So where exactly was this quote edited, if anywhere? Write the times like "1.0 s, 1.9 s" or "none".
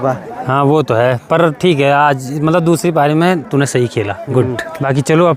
none